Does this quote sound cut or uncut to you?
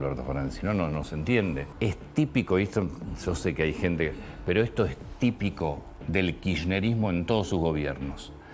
cut